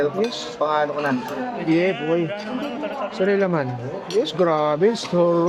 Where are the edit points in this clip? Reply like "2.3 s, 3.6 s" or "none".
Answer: none